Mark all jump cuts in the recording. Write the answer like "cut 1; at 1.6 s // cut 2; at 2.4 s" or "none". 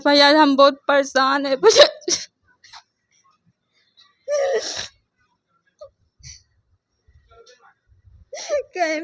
none